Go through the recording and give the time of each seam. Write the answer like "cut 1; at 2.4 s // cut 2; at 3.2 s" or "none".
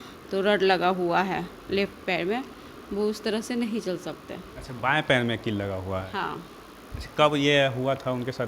none